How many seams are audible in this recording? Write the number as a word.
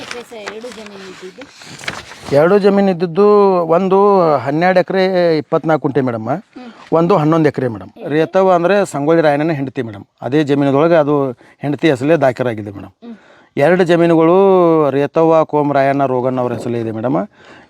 one